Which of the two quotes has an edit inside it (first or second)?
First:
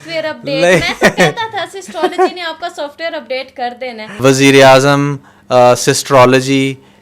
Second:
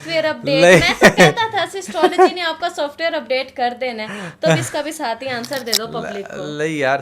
first